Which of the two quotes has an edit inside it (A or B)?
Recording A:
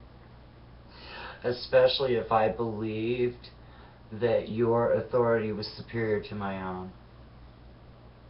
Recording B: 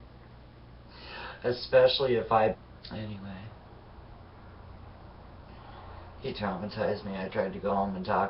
A